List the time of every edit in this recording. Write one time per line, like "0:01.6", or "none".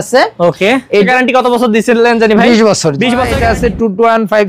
0:01.1
0:03.3